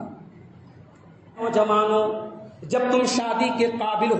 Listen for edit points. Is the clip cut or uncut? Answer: cut